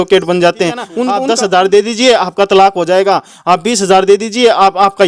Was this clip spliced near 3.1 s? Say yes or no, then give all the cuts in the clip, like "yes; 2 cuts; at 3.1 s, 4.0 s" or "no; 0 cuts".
no; 1 cut; at 1.0 s